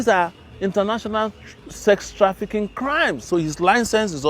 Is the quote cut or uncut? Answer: cut